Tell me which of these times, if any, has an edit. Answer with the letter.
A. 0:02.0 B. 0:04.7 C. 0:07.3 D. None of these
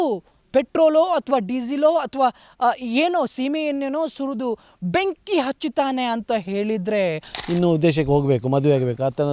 C